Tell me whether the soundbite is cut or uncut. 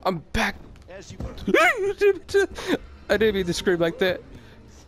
cut